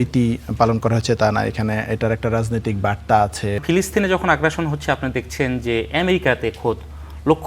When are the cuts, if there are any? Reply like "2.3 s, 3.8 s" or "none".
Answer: 3.6 s